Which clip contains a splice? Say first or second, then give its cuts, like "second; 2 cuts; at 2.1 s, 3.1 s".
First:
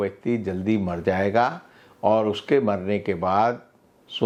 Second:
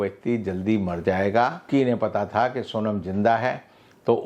second; 1 cut; at 1.7 s